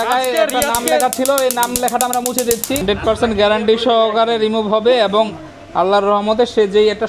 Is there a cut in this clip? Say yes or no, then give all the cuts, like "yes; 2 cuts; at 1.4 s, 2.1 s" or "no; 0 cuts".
yes; 1 cut; at 2.8 s